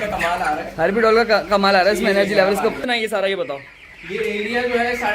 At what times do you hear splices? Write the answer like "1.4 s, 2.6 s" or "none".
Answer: 2.8 s

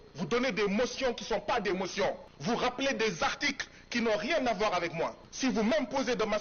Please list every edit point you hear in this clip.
2.3 s, 5.2 s

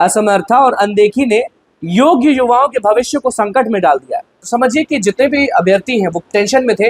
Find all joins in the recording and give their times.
4.4 s

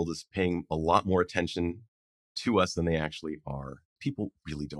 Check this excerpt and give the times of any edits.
3.9 s

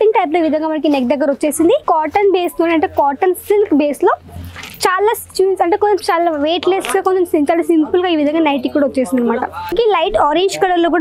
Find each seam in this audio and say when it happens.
1.8 s, 9.7 s

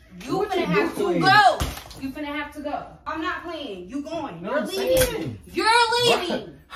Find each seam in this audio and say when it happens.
3.0 s

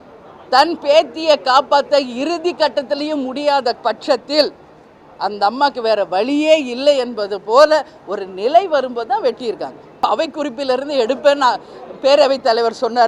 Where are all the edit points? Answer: 10.0 s

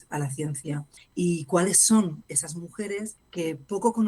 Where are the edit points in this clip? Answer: 1.0 s, 3.2 s

